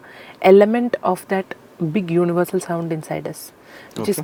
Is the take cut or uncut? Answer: uncut